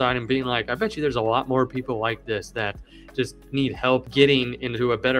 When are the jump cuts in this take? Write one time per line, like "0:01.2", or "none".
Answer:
0:04.1